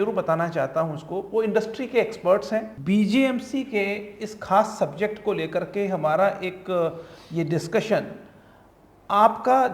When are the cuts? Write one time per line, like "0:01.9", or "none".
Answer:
0:02.7